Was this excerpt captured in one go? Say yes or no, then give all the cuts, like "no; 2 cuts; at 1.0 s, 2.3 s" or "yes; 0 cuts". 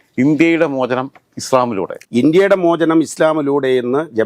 no; 1 cut; at 1.9 s